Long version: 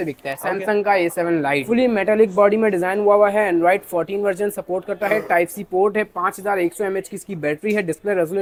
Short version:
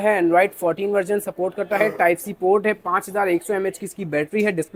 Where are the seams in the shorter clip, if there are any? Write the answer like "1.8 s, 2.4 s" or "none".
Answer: none

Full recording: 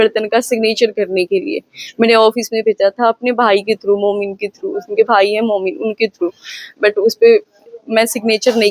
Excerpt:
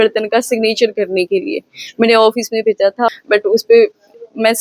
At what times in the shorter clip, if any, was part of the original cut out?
3.1 s

